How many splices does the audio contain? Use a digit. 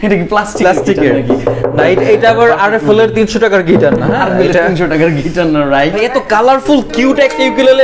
1